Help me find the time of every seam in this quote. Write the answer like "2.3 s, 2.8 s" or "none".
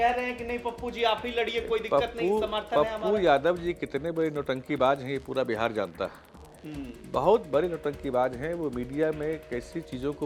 none